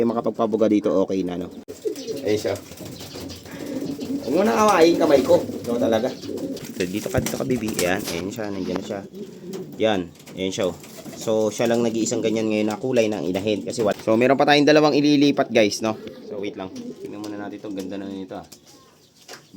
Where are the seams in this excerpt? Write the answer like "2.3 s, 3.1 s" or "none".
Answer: 1.7 s, 6.6 s, 13.9 s